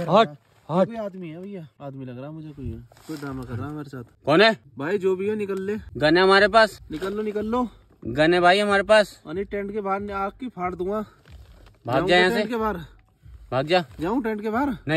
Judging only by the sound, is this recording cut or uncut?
cut